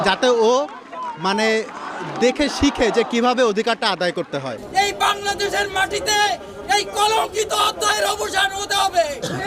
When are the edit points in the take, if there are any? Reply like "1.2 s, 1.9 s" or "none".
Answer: 4.6 s